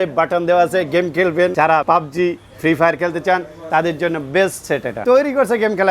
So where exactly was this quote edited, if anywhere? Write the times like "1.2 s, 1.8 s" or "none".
1.7 s, 5.0 s